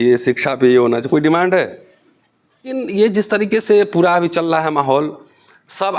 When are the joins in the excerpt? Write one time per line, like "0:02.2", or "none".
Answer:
0:02.7